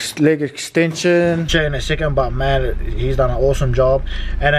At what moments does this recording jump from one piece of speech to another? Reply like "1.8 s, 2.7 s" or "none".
1.5 s